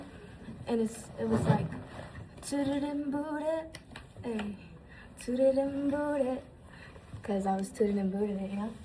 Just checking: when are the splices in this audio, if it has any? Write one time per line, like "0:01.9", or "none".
none